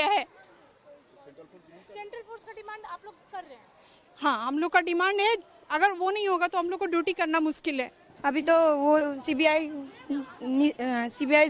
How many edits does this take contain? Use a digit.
1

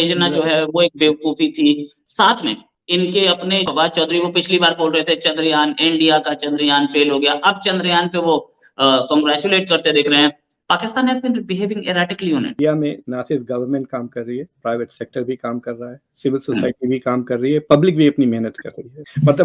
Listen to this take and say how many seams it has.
1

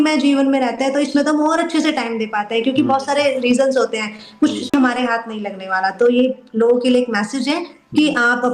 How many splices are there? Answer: 1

